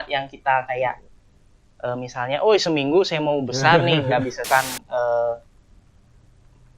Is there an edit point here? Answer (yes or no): yes